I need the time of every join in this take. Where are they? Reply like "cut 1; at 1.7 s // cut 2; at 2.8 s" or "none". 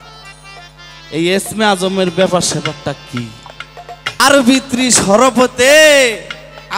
cut 1; at 4.2 s